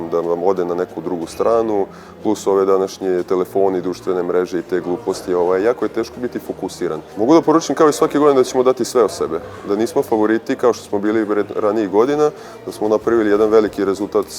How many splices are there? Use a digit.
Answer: 1